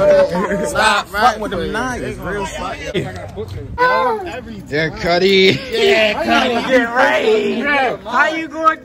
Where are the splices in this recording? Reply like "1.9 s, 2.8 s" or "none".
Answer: 2.9 s

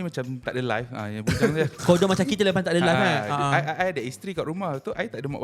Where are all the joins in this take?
none

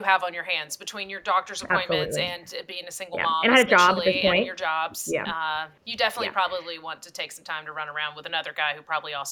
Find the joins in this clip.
5.8 s

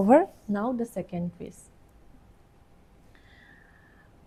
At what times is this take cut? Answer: none

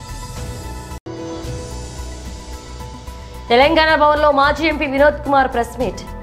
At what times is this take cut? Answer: 1.0 s

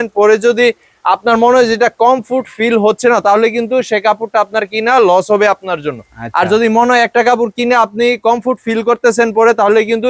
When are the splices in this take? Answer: none

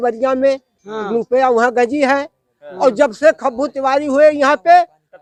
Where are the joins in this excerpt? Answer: none

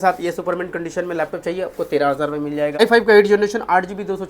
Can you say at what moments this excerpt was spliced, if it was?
2.8 s

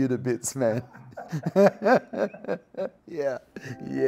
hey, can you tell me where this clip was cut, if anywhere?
3.0 s

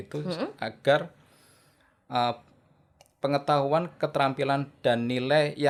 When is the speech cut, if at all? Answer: none

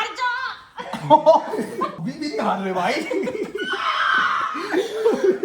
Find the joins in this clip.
2.0 s

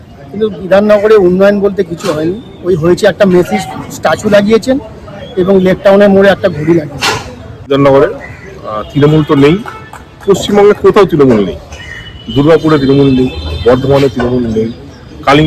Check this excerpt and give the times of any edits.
7.7 s

